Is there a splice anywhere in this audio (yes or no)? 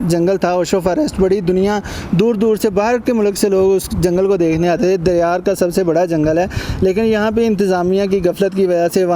no